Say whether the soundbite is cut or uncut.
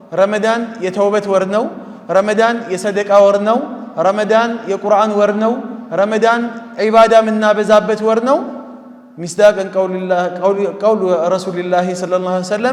uncut